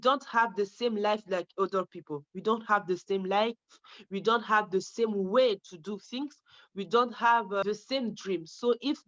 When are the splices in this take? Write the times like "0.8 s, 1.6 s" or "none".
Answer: 7.6 s